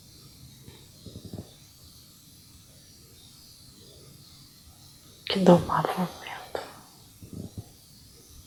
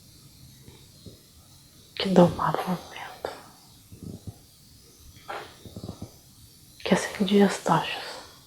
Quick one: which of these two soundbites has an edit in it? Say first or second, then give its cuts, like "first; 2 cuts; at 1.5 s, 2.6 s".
second; 1 cut; at 1.1 s